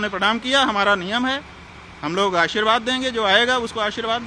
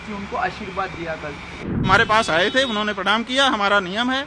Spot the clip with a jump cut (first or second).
second